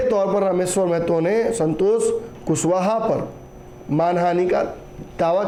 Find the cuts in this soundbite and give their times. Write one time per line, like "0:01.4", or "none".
none